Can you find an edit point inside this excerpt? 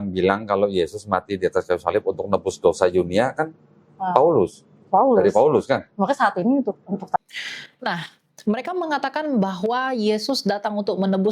no; 0 cuts

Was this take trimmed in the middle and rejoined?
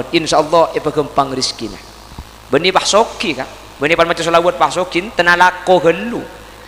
no; 0 cuts

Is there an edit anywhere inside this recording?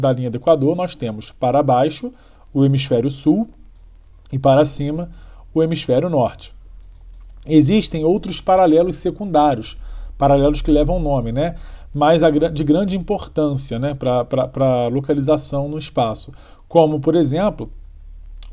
no; 0 cuts

